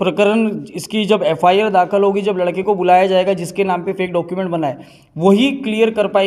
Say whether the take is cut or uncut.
uncut